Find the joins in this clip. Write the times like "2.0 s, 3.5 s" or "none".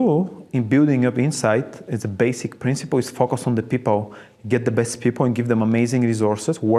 none